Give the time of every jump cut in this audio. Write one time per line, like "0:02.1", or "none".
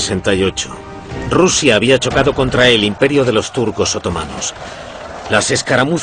0:02.9